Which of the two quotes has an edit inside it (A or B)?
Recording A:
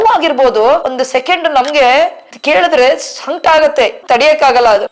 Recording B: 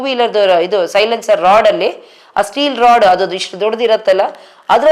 A